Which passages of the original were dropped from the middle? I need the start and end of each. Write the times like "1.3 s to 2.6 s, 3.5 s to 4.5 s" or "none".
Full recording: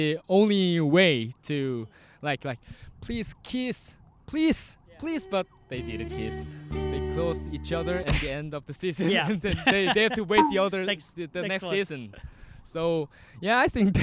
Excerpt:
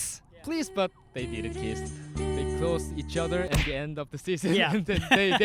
none